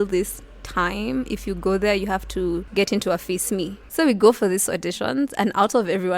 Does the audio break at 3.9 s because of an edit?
yes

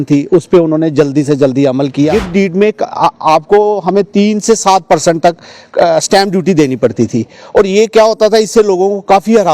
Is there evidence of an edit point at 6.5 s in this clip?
no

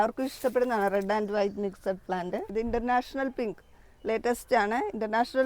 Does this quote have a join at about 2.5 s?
yes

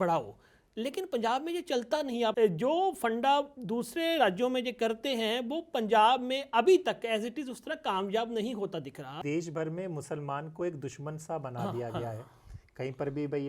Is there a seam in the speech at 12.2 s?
no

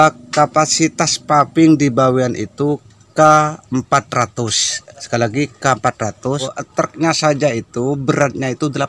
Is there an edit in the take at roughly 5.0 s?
no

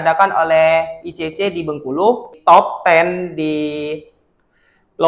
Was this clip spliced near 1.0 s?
no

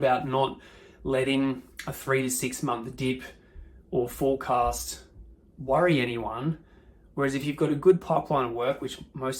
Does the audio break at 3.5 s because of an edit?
no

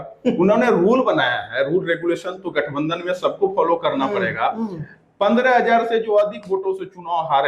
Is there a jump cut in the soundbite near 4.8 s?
no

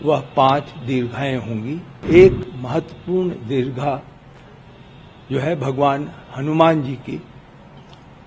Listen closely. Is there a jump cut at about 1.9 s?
yes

